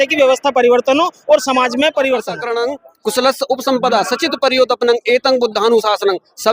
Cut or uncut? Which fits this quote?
cut